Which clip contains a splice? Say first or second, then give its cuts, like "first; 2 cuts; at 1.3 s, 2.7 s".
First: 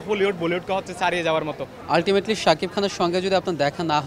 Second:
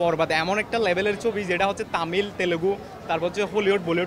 first; 1 cut; at 1.7 s